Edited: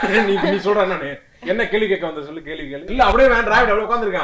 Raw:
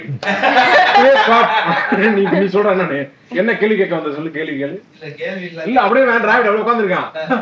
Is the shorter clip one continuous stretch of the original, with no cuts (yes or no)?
no